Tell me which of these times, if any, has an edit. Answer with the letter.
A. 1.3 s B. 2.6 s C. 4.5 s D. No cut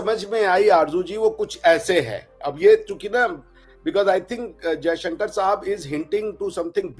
D